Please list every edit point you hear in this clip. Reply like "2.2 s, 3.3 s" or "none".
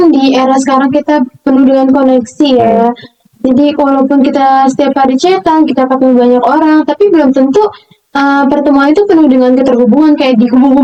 none